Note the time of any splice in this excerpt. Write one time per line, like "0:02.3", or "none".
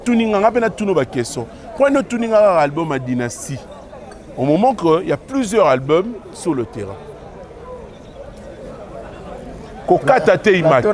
none